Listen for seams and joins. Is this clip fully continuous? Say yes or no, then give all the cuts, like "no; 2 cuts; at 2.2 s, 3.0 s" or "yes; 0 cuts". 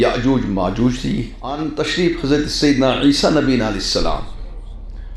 no; 1 cut; at 1.4 s